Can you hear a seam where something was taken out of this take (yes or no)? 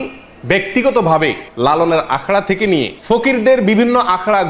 yes